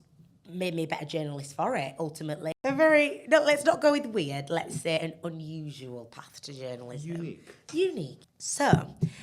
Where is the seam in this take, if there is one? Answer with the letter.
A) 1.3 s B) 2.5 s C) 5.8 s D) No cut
B